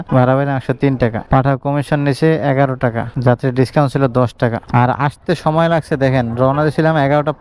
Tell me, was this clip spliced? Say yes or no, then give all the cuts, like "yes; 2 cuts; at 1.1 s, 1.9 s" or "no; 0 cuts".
no; 0 cuts